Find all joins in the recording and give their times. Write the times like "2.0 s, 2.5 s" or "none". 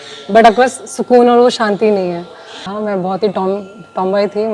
2.7 s